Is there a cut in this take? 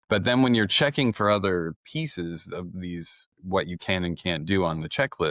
yes; 1 cut; at 1.8 s

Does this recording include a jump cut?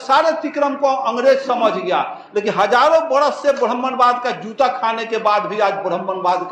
no; 0 cuts

